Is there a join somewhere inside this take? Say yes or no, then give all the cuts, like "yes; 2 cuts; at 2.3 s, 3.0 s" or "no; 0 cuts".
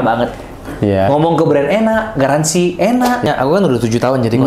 yes; 1 cut; at 3.2 s